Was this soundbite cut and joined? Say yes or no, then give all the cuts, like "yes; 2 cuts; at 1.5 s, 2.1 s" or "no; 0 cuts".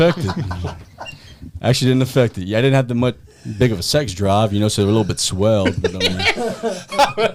no; 0 cuts